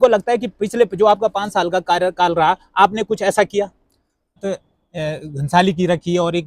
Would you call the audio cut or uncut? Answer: cut